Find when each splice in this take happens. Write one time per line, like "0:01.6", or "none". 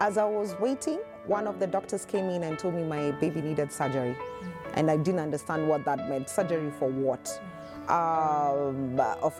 none

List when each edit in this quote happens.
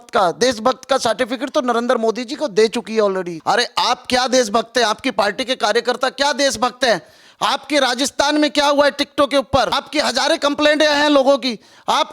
0:03.3
0:09.8

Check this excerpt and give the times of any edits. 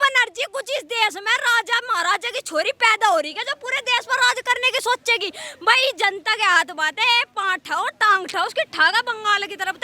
none

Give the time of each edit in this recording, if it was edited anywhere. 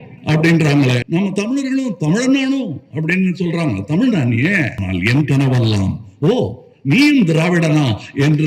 0:01.0
0:04.8

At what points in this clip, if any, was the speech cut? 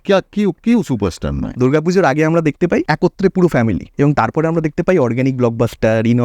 0:01.4
0:02.9
0:03.9

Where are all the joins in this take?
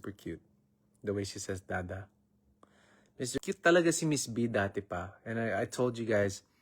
0:03.3

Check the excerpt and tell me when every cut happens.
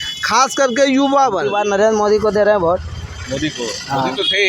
0:01.5

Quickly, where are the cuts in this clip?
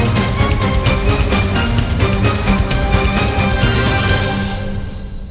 none

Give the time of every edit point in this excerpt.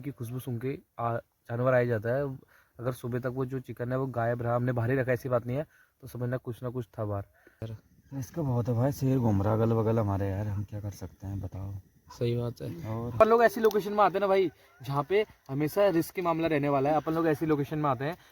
0:07.8
0:13.2

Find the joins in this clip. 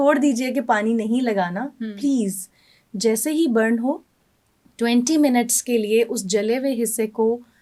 none

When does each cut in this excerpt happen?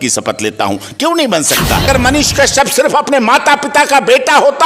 0:01.9

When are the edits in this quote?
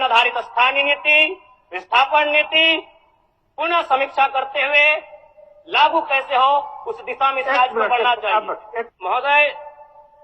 0:08.9

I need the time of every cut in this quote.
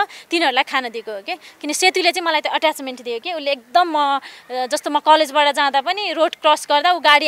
none

